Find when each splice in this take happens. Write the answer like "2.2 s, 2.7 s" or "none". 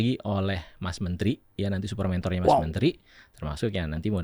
none

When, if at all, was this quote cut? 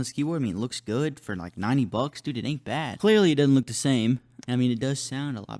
2.9 s, 4.4 s

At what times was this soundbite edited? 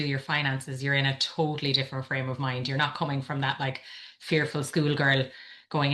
none

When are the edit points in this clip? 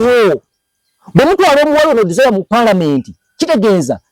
none

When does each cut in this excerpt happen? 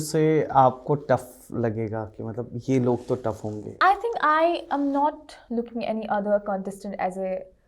3.6 s

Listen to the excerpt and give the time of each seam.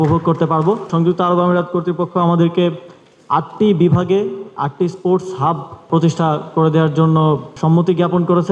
0.9 s, 5.9 s, 7.5 s

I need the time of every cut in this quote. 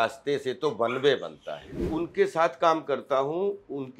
1.8 s

